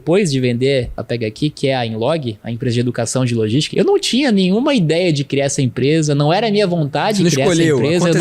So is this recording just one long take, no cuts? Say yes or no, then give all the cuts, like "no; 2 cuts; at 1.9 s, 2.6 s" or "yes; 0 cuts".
no; 2 cuts; at 1.0 s, 3.7 s